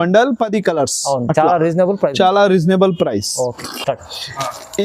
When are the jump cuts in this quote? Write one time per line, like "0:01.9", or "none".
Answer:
0:03.5